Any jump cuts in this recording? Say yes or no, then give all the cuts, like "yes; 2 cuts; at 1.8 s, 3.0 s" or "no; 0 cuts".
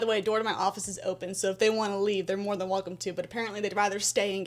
no; 0 cuts